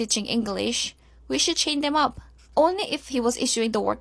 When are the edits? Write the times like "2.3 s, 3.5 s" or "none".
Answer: 1.1 s